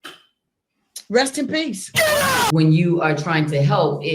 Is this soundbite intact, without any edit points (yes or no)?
no